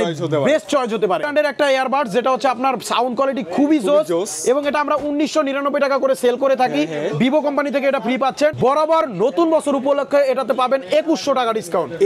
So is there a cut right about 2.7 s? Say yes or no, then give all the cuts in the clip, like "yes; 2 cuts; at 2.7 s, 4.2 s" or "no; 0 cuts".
no; 2 cuts; at 1.3 s, 8.6 s